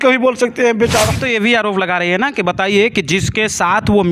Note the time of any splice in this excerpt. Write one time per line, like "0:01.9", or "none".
0:01.2